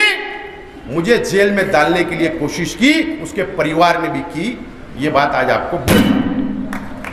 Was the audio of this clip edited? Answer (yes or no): no